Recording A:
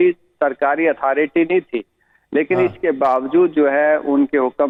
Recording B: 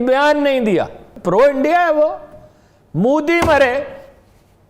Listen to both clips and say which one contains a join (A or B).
B